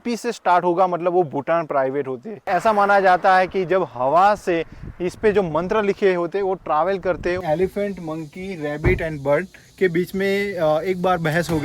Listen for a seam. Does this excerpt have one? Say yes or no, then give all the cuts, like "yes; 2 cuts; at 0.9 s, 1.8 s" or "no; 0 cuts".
yes; 2 cuts; at 2.5 s, 7.4 s